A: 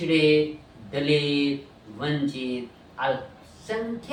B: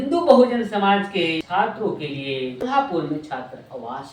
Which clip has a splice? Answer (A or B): B